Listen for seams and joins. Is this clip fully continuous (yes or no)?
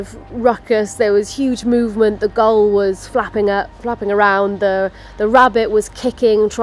yes